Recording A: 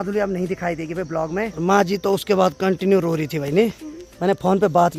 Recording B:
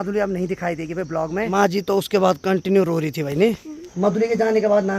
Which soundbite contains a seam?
B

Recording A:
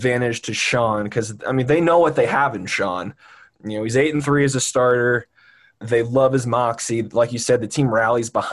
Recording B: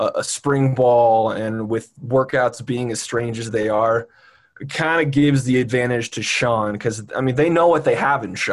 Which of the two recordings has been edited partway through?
A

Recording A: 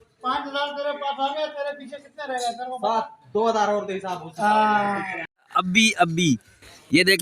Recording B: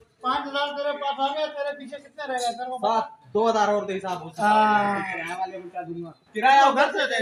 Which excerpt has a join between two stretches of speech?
A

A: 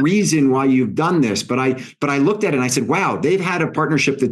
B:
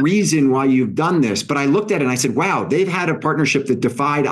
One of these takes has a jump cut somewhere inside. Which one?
B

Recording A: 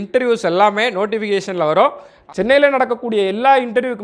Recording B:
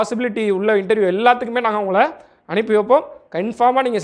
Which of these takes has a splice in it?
A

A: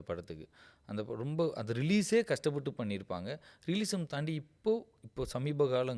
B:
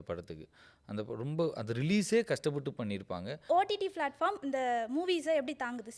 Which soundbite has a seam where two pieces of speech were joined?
B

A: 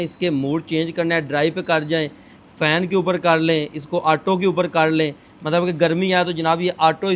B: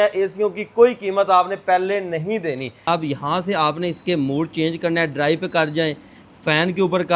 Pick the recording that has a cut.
B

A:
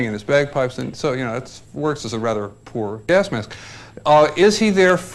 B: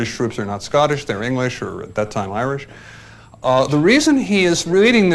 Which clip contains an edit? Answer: A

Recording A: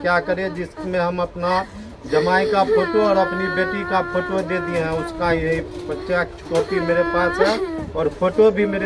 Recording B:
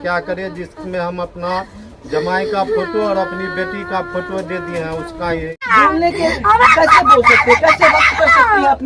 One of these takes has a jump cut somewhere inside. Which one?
B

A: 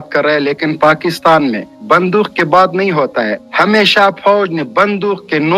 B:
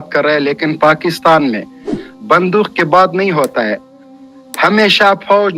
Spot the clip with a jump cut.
A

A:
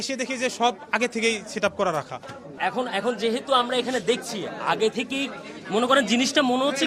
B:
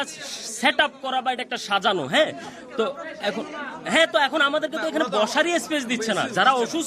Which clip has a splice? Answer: A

